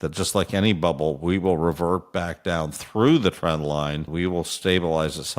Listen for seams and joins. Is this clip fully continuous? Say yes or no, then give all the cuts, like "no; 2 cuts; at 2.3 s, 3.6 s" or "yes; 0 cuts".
no; 1 cut; at 4.1 s